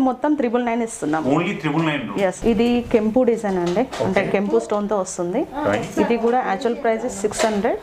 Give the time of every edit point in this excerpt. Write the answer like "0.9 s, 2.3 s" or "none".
2.4 s